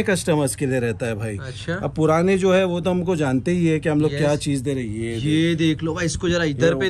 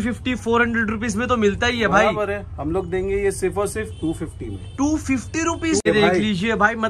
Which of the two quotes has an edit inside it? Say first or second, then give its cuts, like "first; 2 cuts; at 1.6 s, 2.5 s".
second; 1 cut; at 5.9 s